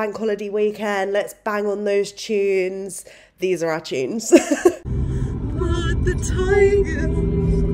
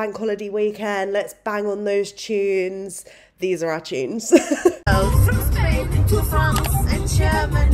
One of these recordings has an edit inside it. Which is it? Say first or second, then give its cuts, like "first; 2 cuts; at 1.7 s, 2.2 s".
first; 1 cut; at 4.8 s